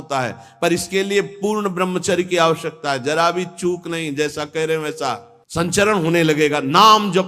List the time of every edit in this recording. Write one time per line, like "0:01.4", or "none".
0:05.3